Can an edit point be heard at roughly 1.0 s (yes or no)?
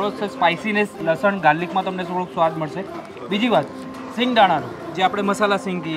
yes